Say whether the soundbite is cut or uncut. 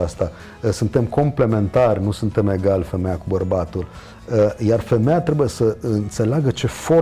uncut